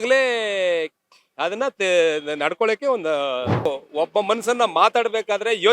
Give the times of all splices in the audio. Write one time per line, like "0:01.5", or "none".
0:03.6